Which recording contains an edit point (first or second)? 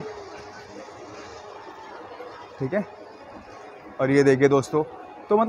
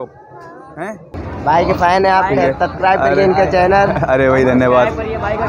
second